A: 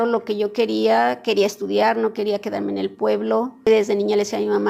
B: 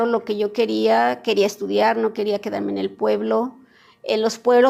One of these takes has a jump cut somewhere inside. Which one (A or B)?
A